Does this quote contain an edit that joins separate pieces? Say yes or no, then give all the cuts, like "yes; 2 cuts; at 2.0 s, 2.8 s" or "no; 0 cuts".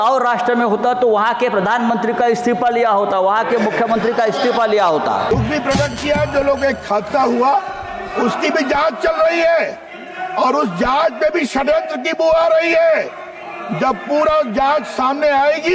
yes; 1 cut; at 5.3 s